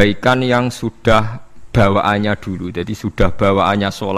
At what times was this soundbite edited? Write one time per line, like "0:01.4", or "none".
none